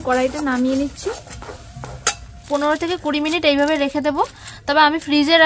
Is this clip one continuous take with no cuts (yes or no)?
no